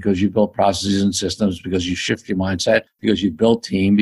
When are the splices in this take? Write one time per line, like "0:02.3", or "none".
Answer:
0:02.9